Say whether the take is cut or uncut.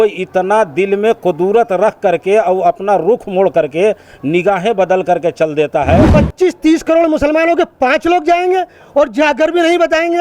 cut